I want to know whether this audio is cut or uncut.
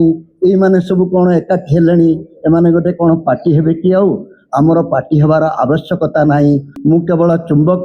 cut